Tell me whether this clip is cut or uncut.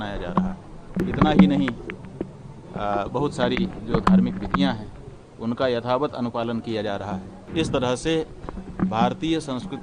cut